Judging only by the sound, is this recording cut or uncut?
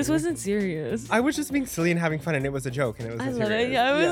cut